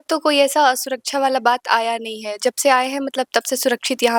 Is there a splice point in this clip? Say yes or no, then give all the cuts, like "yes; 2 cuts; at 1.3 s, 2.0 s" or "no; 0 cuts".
no; 0 cuts